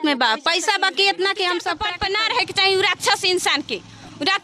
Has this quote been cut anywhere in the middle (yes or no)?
yes